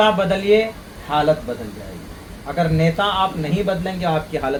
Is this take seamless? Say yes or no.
yes